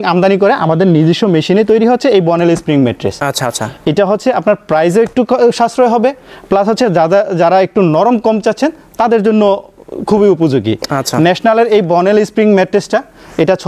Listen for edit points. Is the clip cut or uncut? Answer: uncut